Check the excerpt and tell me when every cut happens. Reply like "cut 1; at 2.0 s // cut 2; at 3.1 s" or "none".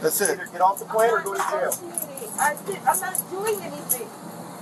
none